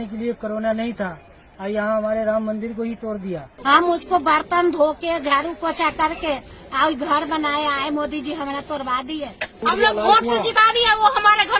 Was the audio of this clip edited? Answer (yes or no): yes